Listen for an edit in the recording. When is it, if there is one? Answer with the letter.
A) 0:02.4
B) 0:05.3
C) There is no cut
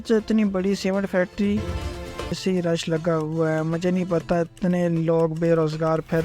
A